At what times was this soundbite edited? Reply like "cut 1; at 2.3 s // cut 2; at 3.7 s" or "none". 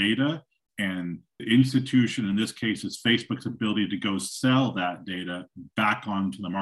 cut 1; at 1.4 s